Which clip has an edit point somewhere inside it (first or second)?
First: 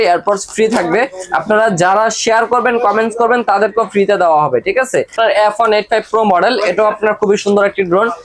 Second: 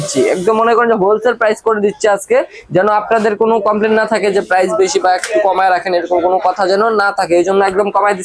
first